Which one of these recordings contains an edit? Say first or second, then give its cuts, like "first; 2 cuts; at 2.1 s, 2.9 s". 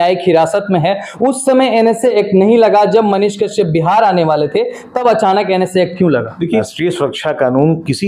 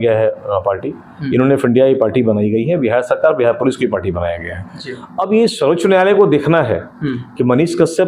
first; 1 cut; at 6.7 s